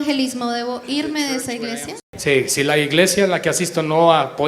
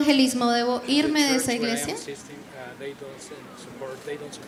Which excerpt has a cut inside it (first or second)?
first